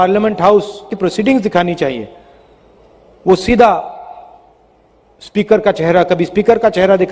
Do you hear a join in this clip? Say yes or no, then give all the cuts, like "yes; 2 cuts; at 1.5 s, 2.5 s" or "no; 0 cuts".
yes; 1 cut; at 0.9 s